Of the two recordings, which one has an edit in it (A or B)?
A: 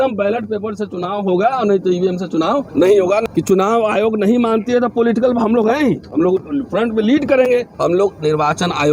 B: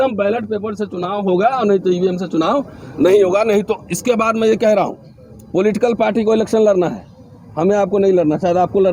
A